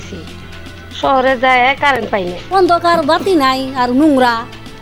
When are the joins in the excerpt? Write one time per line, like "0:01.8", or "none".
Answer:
0:02.4

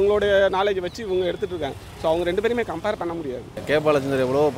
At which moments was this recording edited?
0:03.5

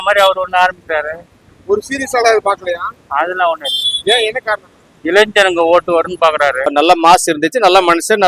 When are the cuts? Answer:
0:06.7

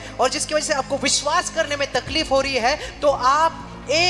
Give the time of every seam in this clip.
none

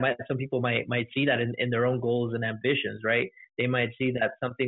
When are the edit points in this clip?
none

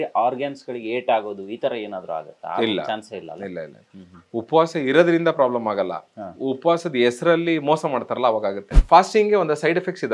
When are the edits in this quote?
0:08.8

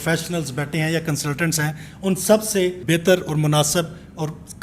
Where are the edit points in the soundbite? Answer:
0:02.8

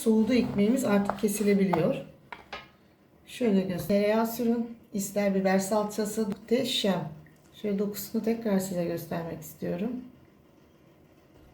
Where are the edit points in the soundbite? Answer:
0:03.8
0:06.3

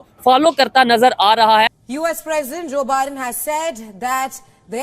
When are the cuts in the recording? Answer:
0:01.7

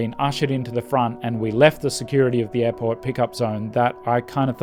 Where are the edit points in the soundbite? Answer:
none

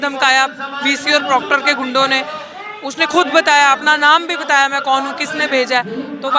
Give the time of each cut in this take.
none

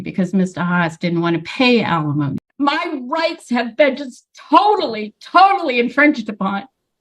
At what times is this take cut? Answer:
0:02.4

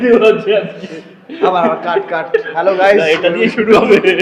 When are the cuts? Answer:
none

